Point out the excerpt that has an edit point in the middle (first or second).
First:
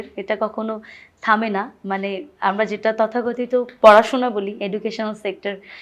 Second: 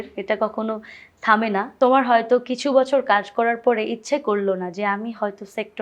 second